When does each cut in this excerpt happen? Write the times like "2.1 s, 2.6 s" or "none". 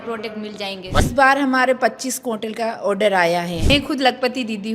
1.0 s, 3.7 s